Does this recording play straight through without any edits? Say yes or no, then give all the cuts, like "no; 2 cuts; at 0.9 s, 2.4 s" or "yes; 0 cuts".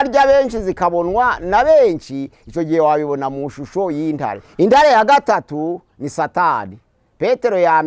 no; 1 cut; at 4.4 s